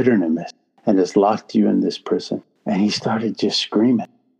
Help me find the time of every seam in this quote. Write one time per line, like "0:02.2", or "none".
0:02.5